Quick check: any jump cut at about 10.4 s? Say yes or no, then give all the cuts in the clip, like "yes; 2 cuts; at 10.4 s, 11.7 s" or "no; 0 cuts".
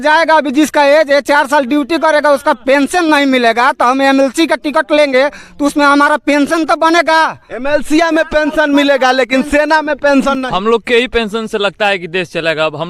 yes; 1 cut; at 10.4 s